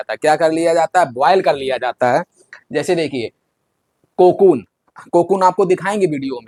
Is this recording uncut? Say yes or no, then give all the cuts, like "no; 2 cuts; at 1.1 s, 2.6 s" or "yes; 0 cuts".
yes; 0 cuts